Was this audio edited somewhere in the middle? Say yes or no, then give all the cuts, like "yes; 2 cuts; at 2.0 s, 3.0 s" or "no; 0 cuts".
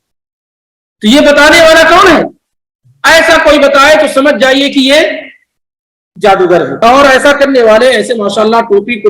yes; 1 cut; at 6.8 s